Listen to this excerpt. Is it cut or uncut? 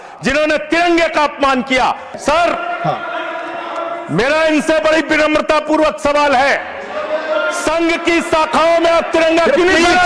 cut